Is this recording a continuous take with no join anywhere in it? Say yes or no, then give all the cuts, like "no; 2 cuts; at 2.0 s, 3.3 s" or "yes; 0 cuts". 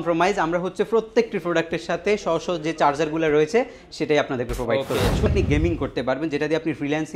no; 1 cut; at 5.3 s